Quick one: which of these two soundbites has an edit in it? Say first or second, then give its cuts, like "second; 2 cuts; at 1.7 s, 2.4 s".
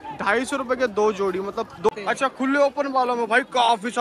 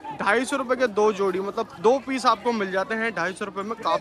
first; 1 cut; at 1.9 s